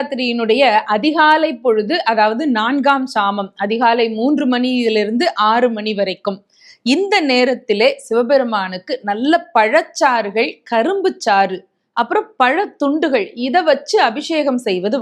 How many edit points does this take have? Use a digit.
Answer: 0